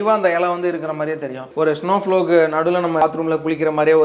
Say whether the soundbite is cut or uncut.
cut